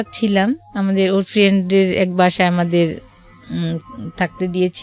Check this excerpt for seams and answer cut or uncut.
uncut